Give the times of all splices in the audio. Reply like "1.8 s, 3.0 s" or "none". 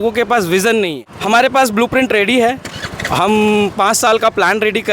1.0 s